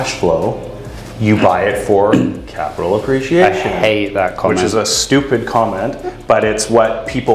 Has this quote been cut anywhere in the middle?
no; 0 cuts

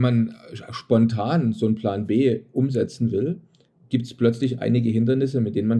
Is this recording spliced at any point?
no; 0 cuts

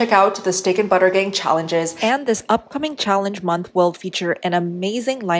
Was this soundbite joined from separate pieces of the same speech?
yes; 1 cut; at 1.9 s

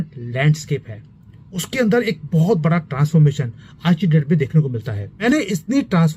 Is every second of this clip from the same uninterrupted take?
no; 1 cut; at 5.2 s

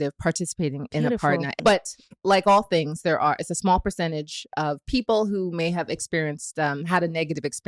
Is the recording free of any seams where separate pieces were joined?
no; 1 cut; at 1.5 s

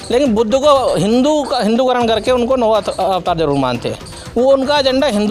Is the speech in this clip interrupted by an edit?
no; 0 cuts

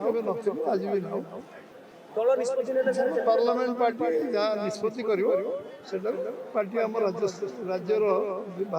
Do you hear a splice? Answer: no; 0 cuts

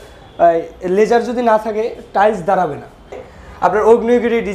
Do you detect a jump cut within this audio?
yes; 1 cut; at 3.2 s

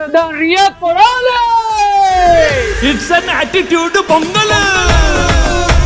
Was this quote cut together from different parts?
no; 0 cuts

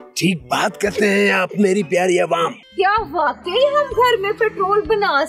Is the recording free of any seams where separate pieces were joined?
no; 1 cut; at 2.6 s

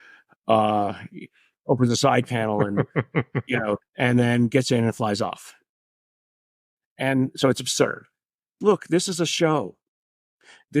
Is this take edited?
yes; 2 cuts; at 3.8 s, 8.6 s

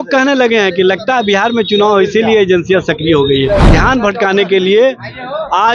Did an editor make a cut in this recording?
yes; 1 cut; at 3.7 s

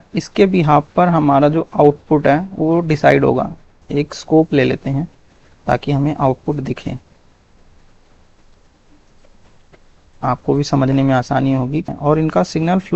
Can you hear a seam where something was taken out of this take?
yes; 2 cuts; at 3.8 s, 11.9 s

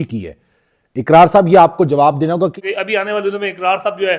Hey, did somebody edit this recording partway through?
yes; 1 cut; at 2.5 s

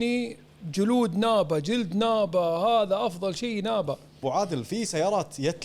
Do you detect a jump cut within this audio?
yes; 1 cut; at 4.2 s

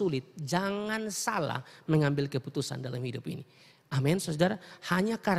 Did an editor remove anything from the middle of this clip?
no; 0 cuts

